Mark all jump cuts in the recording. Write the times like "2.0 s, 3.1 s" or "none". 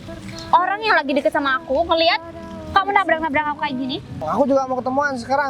4.2 s